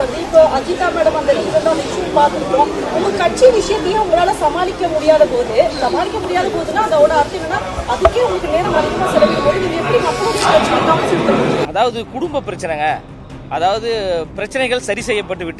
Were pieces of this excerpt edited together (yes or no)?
no